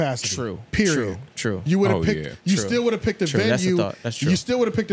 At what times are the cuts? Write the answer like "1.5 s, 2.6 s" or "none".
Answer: none